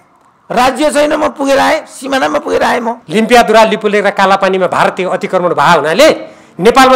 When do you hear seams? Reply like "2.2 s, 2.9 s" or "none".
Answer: 3.0 s